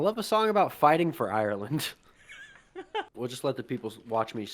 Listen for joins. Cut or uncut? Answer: cut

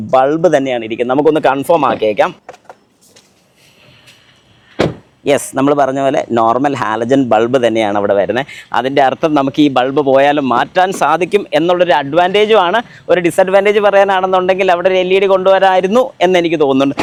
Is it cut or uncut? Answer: uncut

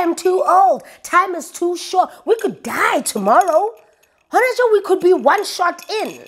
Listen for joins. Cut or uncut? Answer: uncut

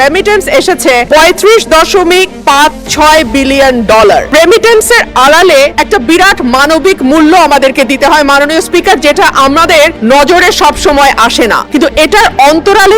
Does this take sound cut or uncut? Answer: cut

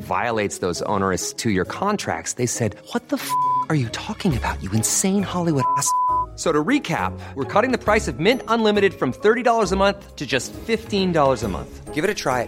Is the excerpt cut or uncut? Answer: uncut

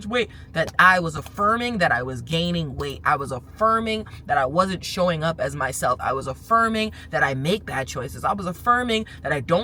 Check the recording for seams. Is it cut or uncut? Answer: uncut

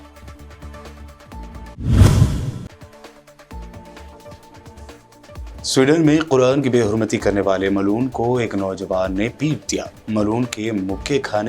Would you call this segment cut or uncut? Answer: cut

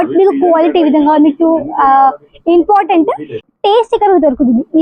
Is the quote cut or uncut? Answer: cut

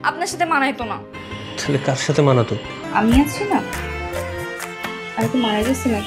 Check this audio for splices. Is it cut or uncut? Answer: cut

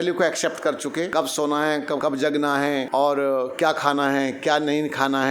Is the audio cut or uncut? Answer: cut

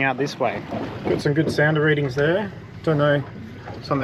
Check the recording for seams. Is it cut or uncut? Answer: cut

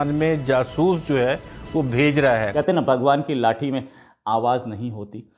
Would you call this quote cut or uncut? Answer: cut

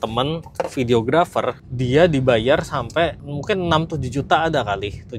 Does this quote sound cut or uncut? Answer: cut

